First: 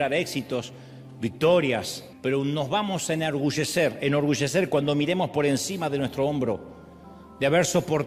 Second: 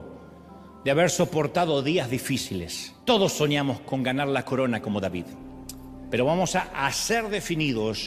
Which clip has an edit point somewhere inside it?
second; 1 cut; at 2.8 s

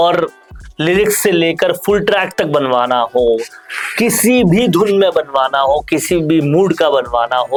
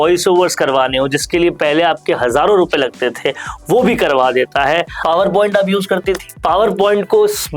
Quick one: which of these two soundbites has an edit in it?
second; 1 cut; at 4.9 s

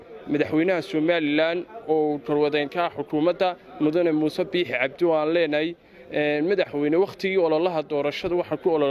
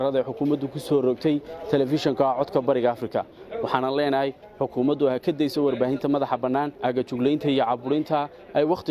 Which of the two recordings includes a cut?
second; 1 cut; at 6.7 s

